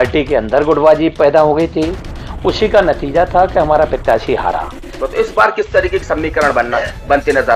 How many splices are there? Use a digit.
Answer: 1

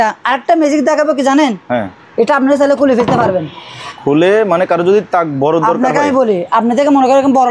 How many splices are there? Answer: 0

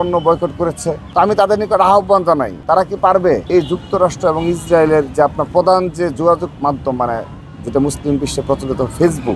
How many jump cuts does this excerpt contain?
3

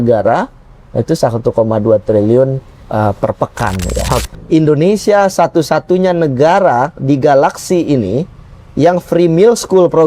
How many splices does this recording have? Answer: 1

